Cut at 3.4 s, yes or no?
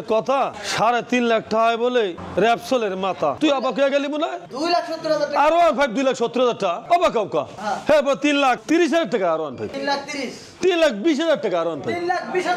yes